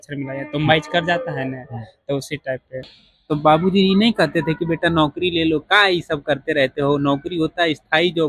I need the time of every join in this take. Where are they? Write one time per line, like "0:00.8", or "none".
0:03.0